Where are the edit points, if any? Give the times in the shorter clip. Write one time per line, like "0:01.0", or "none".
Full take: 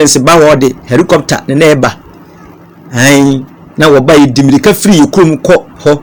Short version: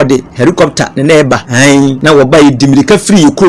0:01.8